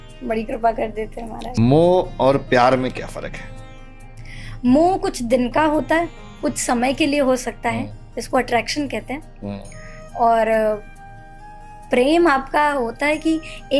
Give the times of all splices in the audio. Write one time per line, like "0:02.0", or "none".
0:01.5